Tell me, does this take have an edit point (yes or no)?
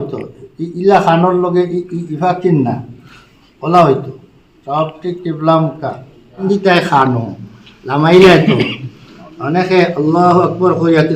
yes